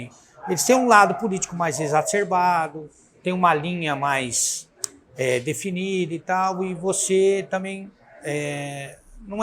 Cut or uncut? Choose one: uncut